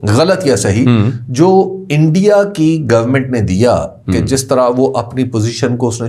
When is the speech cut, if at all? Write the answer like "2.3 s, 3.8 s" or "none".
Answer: none